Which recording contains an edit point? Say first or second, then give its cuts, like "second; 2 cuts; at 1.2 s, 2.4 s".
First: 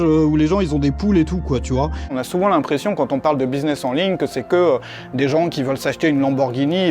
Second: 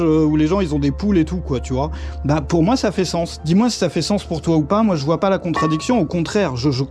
first; 1 cut; at 2.2 s